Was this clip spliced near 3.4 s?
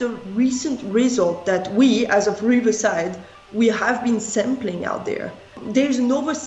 no; 1 cut; at 5.5 s

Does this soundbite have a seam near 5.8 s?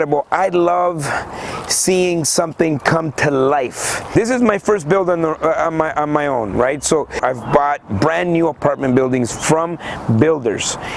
no; 2 cuts; at 4.0 s, 7.2 s

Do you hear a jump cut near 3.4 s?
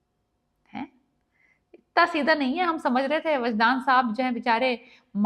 no; 0 cuts

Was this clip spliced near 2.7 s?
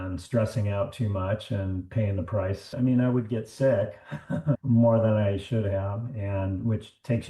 yes; 2 cuts; at 2.7 s, 4.6 s

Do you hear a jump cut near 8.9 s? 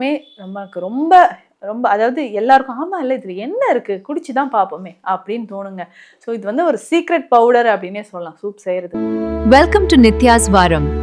yes; 1 cut; at 8.9 s

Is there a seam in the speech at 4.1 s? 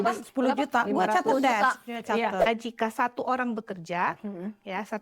no; 1 cut; at 2.4 s

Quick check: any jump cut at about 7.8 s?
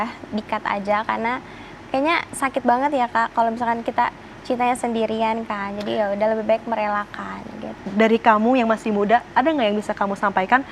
yes; 1 cut; at 7.8 s

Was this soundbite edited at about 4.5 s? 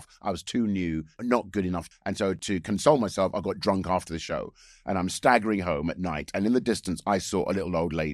no; 1 cut; at 1.9 s

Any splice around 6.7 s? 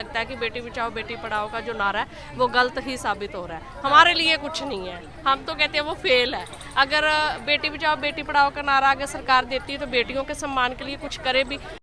no; 0 cuts

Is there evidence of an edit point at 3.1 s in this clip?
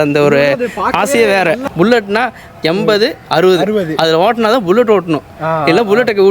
no; 1 cut; at 1.6 s

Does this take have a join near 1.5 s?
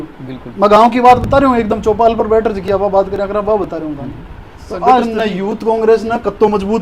no; 1 cut; at 5.2 s

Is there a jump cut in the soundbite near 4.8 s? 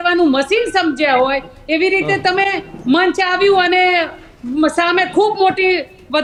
no; 0 cuts

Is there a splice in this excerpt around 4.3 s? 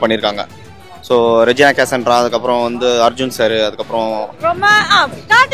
yes; 1 cut; at 4.3 s

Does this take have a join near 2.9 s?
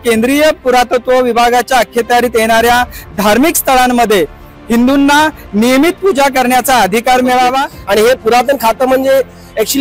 no; 1 cut; at 7.7 s

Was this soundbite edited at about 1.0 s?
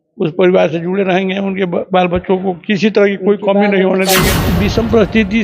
no; 1 cut; at 4.4 s

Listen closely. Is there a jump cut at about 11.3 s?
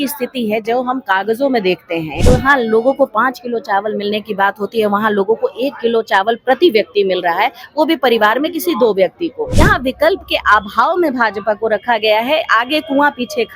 no; 2 cuts; at 2.1 s, 9.4 s

